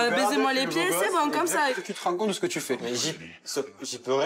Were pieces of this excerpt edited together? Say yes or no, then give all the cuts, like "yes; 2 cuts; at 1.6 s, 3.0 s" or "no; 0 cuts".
yes; 1 cut; at 1.8 s